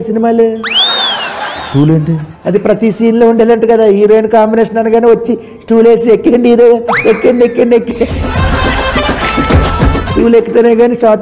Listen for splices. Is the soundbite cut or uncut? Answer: cut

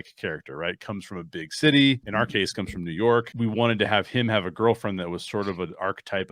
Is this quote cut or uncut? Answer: cut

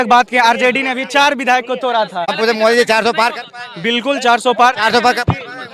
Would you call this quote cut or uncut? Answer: uncut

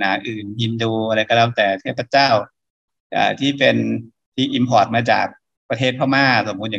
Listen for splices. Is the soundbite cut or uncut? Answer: uncut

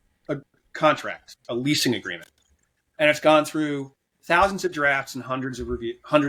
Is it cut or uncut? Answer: uncut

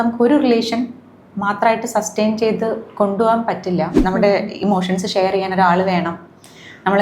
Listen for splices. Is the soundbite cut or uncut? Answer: cut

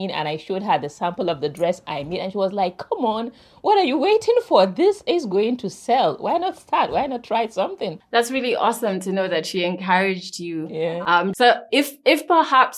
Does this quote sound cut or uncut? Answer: uncut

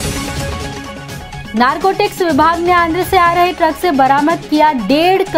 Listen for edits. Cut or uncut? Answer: uncut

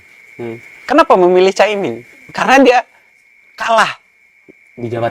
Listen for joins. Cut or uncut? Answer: uncut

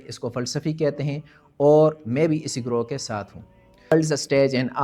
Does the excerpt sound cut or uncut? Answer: cut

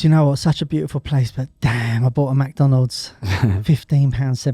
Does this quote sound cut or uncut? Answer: uncut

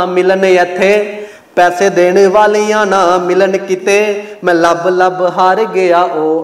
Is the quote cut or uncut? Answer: uncut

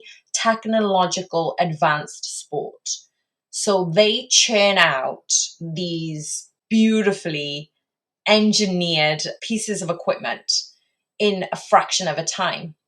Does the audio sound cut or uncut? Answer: cut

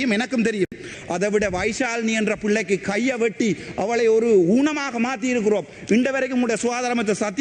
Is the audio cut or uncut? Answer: cut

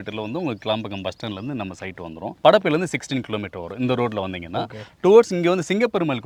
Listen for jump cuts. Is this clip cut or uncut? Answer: uncut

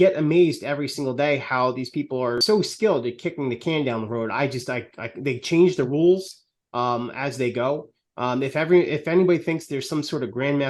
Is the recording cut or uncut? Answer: cut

